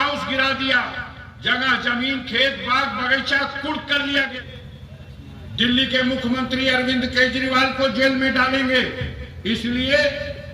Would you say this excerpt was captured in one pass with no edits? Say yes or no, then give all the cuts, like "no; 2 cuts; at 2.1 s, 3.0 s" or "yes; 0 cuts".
no; 1 cut; at 4.3 s